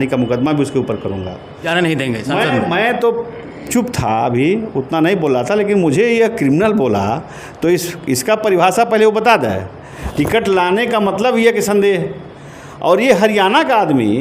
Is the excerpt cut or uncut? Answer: cut